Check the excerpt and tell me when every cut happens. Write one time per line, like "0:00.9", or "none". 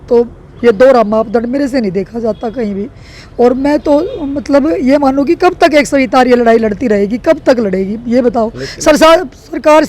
none